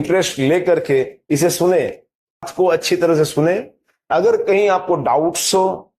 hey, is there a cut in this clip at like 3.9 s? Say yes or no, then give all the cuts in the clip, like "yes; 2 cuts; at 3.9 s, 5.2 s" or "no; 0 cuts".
no; 1 cut; at 2.5 s